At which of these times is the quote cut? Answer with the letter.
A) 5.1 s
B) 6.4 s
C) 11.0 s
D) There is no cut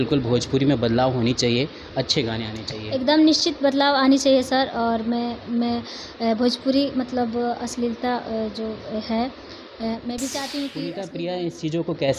C